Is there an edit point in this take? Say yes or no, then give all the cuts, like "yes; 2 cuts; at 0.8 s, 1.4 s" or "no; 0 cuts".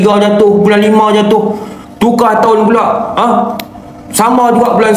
no; 0 cuts